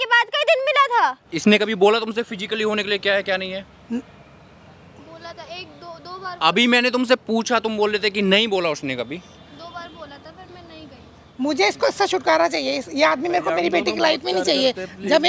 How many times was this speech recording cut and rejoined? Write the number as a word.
two